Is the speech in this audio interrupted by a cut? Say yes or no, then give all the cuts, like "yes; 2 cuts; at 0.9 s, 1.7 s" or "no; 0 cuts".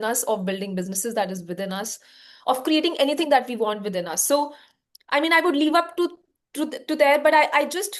no; 0 cuts